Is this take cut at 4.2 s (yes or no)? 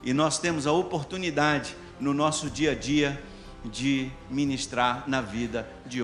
no